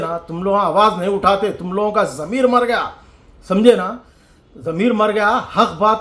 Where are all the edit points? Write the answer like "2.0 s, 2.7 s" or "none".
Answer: none